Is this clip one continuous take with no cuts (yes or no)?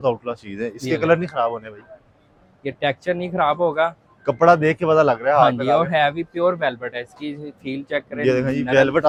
yes